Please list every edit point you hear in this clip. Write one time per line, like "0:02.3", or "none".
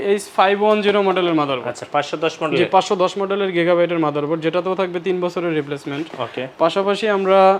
none

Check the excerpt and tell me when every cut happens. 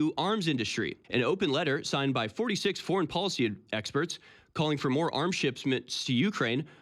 0:01.0

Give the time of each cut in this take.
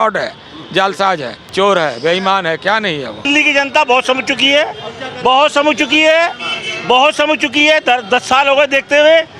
0:01.4
0:03.3

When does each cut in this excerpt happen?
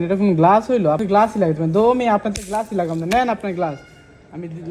0:01.0

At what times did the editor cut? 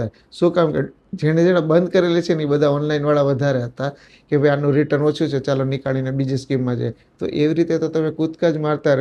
0:04.1

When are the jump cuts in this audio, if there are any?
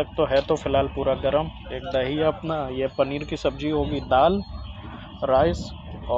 none

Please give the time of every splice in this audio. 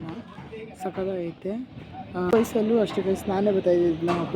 0:02.3

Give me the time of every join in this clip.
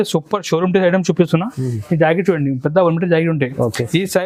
none

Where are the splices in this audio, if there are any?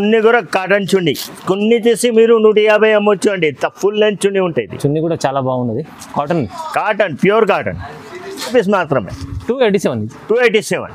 0:08.5

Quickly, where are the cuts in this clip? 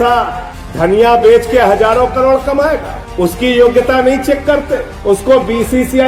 none

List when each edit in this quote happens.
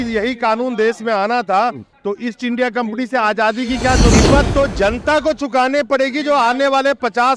0:04.1

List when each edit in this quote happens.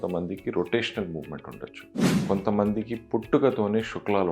0:02.1

